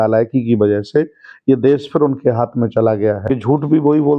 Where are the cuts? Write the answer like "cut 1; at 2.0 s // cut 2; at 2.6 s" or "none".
cut 1; at 3.3 s